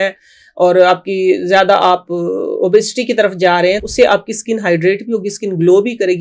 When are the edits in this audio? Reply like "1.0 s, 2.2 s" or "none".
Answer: 3.8 s